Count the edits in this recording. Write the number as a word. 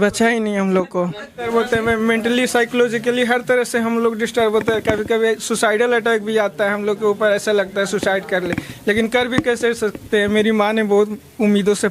one